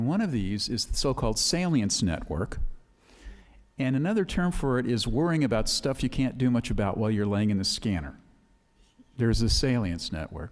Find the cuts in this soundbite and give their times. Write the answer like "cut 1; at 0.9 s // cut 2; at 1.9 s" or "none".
cut 1; at 1.2 s